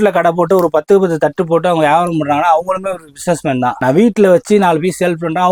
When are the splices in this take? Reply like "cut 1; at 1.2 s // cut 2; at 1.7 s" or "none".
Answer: none